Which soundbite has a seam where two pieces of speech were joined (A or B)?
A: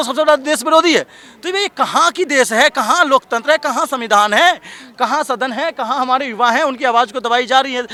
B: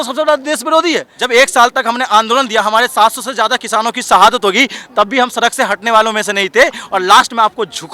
B